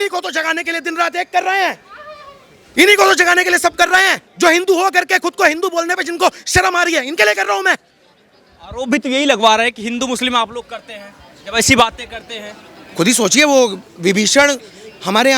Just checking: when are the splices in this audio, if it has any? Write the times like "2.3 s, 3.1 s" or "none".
none